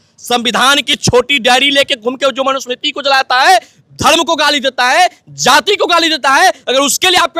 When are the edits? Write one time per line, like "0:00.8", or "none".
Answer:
none

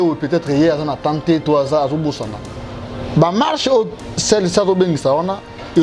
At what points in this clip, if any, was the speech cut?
none

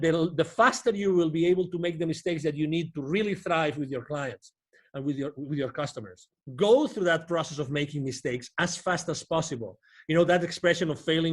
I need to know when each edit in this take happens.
0:06.4

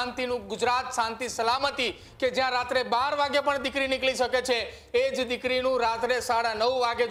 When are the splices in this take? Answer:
none

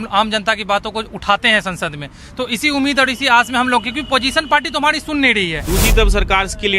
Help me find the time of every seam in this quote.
0:05.6

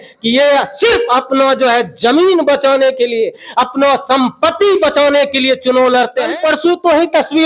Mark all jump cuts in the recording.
0:06.3

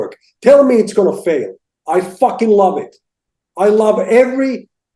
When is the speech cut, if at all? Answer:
none

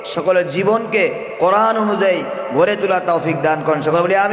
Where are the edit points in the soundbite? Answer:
none

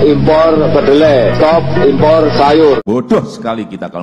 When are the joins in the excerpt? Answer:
0:02.8

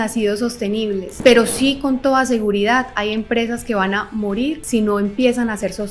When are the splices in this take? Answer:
0:01.1
0:04.6

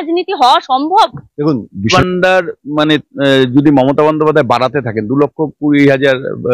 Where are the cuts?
0:01.9

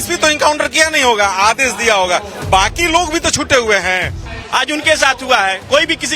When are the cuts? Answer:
0:04.2

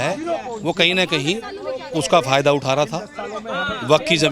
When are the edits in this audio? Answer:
none

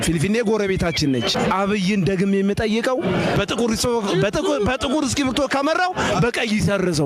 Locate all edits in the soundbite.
none

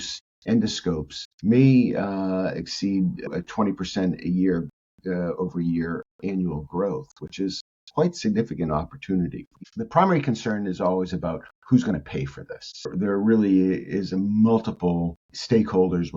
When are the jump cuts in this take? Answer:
0:03.3
0:09.5
0:12.9

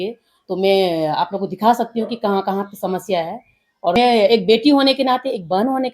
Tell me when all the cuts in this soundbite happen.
0:04.0

